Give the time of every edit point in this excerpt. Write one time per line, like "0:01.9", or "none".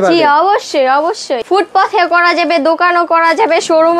0:01.3